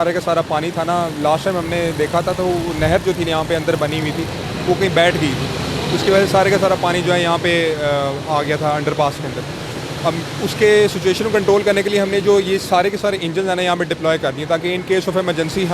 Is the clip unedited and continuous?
yes; 0 cuts

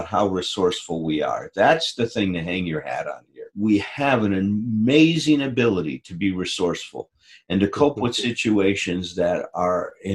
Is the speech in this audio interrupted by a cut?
yes; 1 cut; at 3.5 s

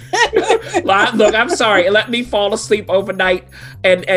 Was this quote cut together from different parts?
no; 0 cuts

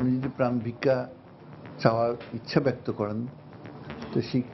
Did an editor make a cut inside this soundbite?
no; 0 cuts

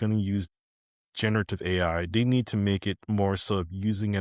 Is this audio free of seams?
yes; 0 cuts

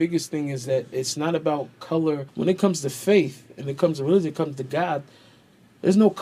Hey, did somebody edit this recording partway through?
yes; 1 cut; at 2.3 s

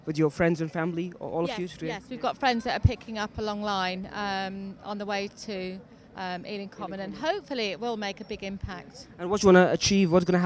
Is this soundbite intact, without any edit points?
yes; 0 cuts

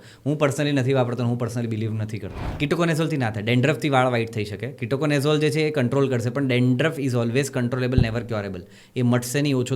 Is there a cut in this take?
yes; 1 cut; at 2.4 s

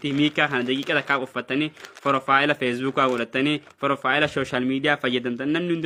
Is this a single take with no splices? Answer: yes; 0 cuts

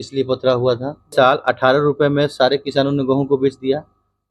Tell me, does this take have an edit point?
yes; 1 cut; at 1.1 s

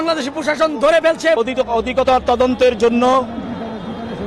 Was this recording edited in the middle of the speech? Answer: yes; 1 cut; at 1.4 s

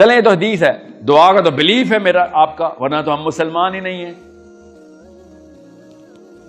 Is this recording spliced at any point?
yes; 1 cut; at 4.3 s

